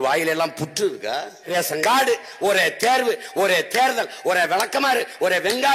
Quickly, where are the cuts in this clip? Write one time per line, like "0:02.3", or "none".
0:01.5